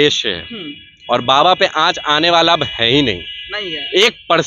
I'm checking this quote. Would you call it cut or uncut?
uncut